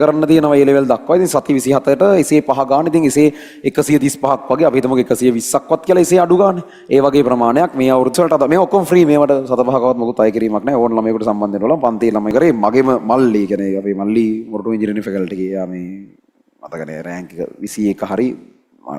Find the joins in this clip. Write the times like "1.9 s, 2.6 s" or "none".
8.1 s, 12.3 s